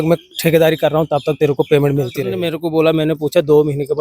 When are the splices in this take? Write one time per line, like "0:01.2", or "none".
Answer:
0:02.5